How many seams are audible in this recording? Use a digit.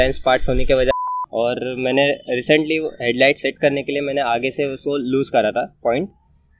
1